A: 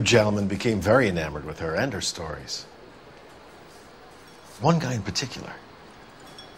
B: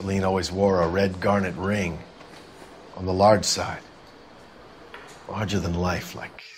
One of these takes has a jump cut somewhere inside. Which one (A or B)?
A